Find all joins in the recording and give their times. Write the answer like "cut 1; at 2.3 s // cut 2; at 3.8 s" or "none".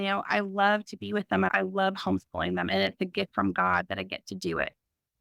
cut 1; at 1.5 s